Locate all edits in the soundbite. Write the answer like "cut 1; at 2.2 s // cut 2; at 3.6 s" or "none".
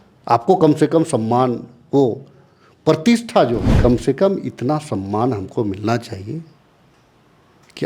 cut 1; at 3.8 s